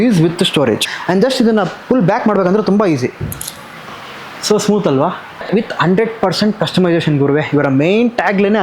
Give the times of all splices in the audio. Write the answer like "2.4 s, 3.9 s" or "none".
0.9 s, 5.5 s